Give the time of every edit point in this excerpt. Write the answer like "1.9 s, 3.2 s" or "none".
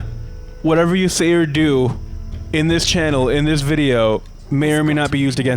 4.4 s